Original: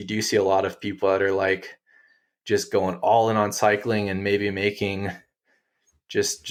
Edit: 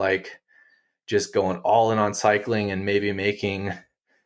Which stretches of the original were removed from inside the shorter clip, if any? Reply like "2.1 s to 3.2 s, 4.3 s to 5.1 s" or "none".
none